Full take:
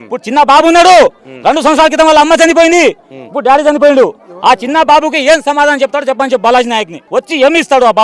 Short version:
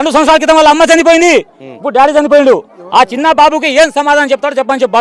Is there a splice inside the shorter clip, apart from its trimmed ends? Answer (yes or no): no